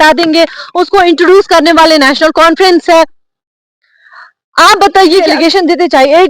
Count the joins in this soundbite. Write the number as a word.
one